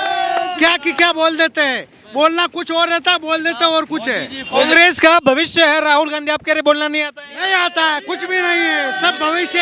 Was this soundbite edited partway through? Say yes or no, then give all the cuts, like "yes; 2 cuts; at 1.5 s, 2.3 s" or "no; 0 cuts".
no; 0 cuts